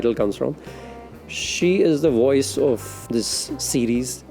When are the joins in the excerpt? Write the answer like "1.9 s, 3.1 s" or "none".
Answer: 2.9 s

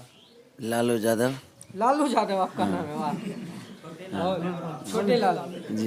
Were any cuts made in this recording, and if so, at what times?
none

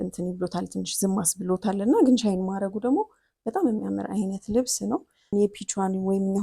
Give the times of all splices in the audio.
5.3 s

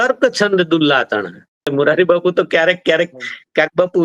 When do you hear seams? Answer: 1.7 s

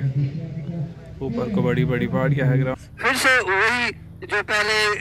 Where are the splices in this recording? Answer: 2.8 s

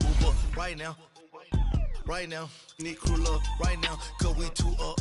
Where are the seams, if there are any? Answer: none

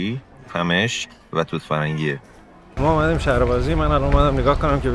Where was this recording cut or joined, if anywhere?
2.8 s

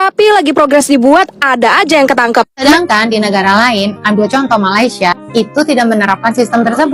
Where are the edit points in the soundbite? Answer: 2.6 s

